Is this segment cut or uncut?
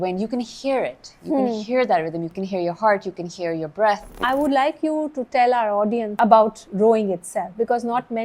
cut